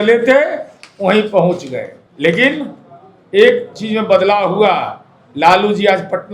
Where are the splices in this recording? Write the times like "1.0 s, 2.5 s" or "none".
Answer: 2.0 s